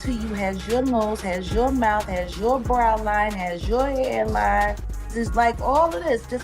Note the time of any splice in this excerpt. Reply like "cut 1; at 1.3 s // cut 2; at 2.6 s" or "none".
cut 1; at 5.1 s